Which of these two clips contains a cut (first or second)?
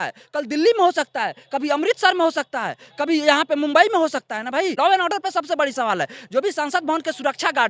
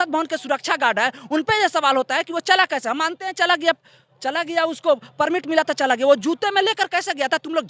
first